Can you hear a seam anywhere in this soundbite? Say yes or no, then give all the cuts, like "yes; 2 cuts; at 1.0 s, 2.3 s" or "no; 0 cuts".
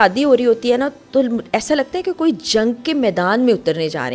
no; 0 cuts